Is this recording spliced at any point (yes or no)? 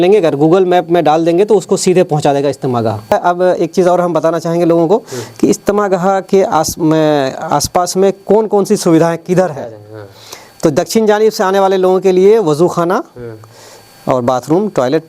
yes